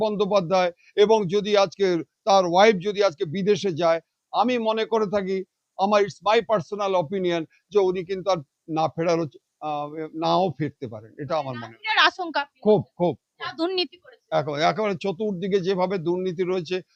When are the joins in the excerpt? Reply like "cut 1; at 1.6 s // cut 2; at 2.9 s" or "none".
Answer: none